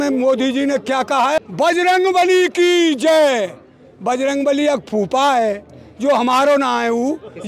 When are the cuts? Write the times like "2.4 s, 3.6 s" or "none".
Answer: 1.4 s